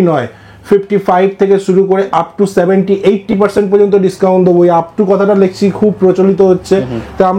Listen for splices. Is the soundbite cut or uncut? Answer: uncut